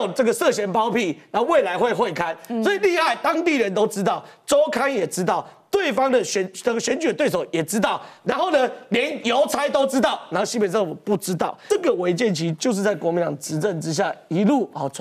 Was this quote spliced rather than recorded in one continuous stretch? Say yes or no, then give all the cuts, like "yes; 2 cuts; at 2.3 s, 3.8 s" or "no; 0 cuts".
yes; 1 cut; at 11.6 s